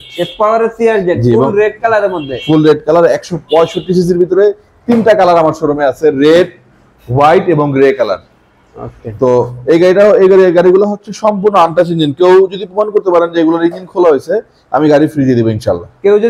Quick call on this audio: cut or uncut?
uncut